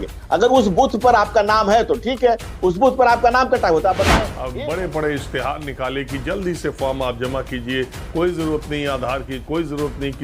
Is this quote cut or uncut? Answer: cut